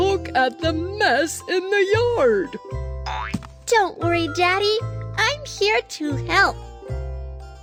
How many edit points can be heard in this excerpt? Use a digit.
0